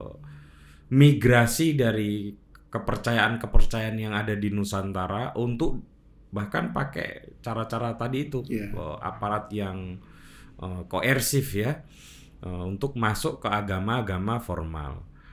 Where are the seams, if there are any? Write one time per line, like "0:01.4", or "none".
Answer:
none